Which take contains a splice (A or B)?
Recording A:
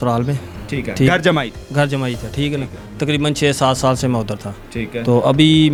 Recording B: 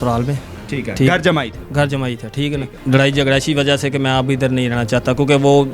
B